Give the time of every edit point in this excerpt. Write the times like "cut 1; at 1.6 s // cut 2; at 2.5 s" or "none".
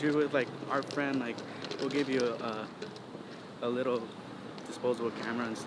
none